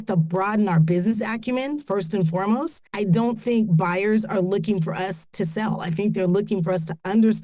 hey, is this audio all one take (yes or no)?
no